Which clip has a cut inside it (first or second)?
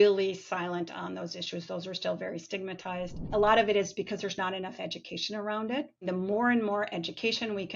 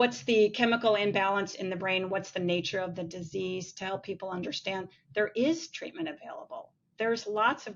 first